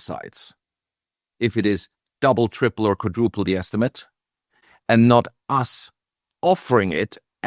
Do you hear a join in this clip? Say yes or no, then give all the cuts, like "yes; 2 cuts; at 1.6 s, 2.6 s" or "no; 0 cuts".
no; 0 cuts